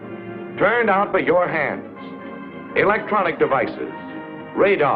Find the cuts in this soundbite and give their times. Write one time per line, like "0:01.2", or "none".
none